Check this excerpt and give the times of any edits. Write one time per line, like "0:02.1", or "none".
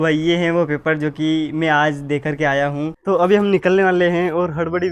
0:03.0